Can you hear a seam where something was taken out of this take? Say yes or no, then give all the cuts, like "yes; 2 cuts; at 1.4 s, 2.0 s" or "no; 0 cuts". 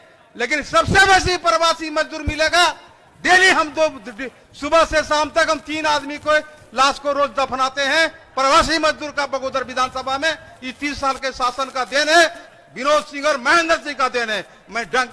no; 0 cuts